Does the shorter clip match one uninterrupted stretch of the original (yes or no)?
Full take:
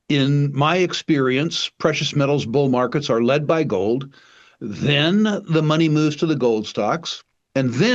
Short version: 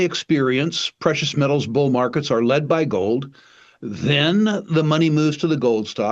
yes